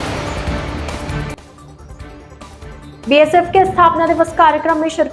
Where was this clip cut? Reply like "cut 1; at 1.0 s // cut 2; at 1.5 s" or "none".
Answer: cut 1; at 1.2 s